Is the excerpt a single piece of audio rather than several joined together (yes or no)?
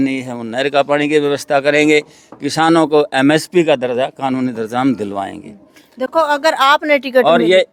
yes